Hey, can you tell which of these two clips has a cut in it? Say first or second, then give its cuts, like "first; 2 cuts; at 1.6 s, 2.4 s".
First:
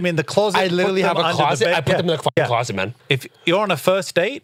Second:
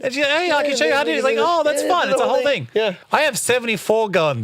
second; 1 cut; at 3.0 s